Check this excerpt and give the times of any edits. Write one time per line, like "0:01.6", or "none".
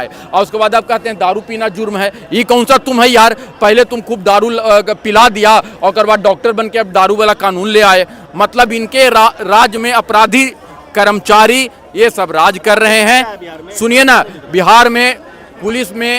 none